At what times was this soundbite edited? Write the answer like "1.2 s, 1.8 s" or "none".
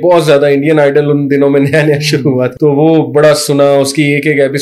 2.5 s